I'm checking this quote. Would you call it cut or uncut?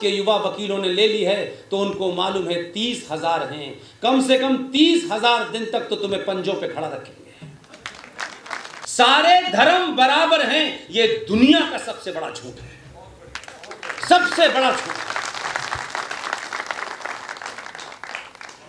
uncut